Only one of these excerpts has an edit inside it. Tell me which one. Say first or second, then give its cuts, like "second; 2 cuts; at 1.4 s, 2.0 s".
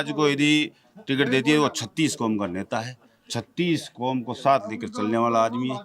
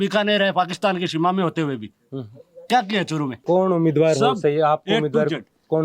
second; 1 cut; at 3.3 s